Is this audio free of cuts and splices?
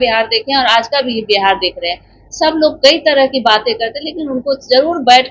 yes; 0 cuts

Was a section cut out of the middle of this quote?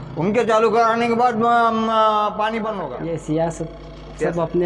yes; 1 cut; at 2.9 s

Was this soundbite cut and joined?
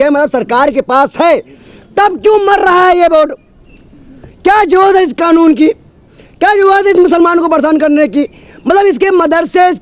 no; 0 cuts

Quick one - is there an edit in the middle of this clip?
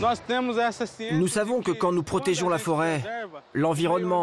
yes; 1 cut; at 1.0 s

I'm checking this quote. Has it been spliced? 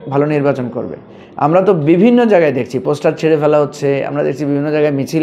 no; 0 cuts

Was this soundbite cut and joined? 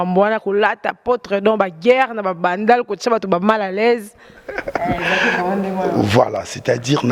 no; 0 cuts

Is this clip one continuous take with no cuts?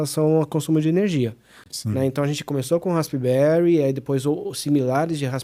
yes; 0 cuts

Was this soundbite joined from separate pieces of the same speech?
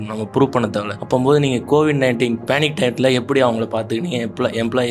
yes; 2 cuts; at 1.0 s, 2.4 s

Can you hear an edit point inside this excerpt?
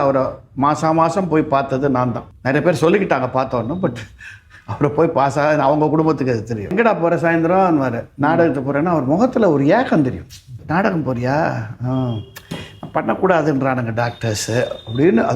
yes; 3 cuts; at 2.3 s, 6.7 s, 10.6 s

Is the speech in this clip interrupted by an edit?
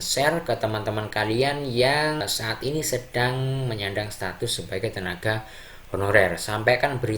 yes; 1 cut; at 2.2 s

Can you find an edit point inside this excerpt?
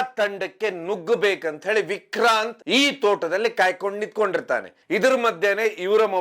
yes; 2 cuts; at 2.6 s, 4.7 s

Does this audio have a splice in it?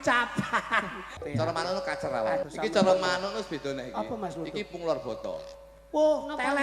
yes; 2 cuts; at 1.1 s, 2.4 s

